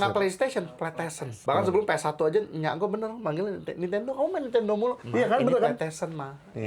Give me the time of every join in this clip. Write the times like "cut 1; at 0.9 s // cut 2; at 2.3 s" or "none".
cut 1; at 1.3 s // cut 2; at 5.0 s